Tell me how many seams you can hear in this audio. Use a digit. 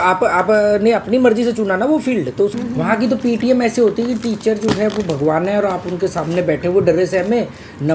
1